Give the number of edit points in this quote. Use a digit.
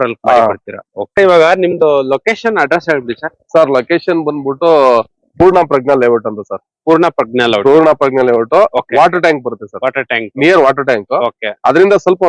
1